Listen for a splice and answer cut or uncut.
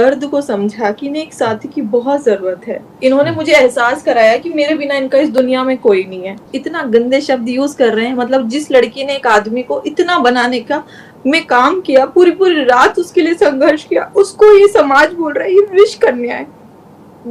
cut